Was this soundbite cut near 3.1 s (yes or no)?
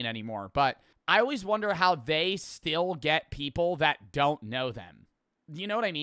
yes